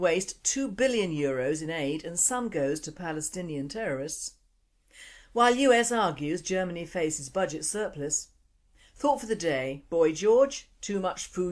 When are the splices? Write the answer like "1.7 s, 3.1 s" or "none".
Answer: 1.5 s